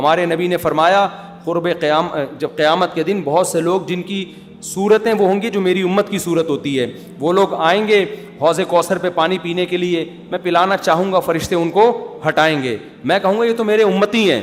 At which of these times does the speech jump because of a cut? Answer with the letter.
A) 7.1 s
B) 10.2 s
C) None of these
C